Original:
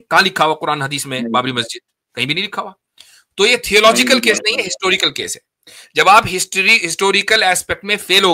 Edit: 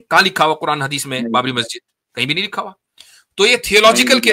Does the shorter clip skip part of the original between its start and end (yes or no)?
no